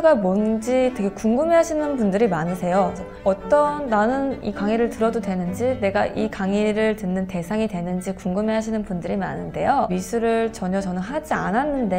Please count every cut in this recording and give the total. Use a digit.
2